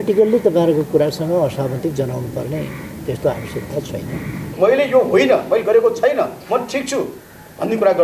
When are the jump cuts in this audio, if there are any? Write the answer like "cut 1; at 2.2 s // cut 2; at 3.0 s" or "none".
cut 1; at 4.4 s

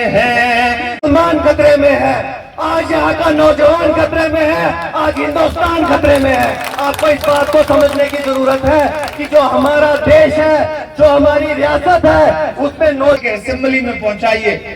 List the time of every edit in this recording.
cut 1; at 0.9 s // cut 2; at 13.2 s

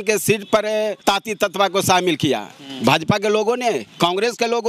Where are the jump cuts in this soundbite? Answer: cut 1; at 1.0 s

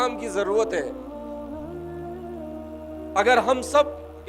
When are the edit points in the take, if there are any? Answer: cut 1; at 0.9 s // cut 2; at 3.1 s

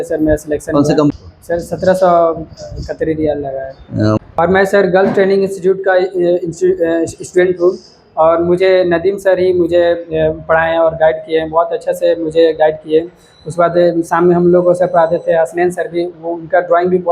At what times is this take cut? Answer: cut 1; at 1.1 s // cut 2; at 4.2 s

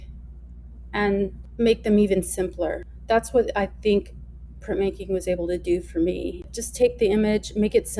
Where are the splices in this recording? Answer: cut 1; at 1.4 s // cut 2; at 2.9 s // cut 3; at 6.4 s

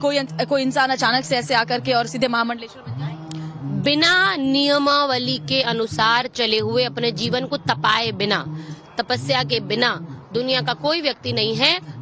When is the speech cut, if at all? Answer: none

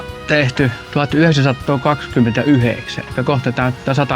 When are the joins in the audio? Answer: none

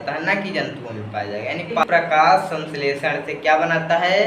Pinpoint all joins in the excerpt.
cut 1; at 1.8 s

